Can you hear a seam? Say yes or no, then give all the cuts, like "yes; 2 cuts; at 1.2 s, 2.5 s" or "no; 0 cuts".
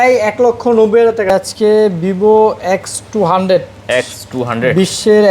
yes; 1 cut; at 1.3 s